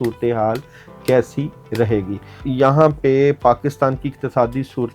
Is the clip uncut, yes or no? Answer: no